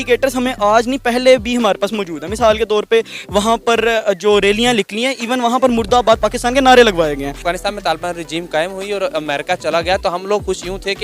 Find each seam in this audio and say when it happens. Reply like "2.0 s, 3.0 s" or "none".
7.4 s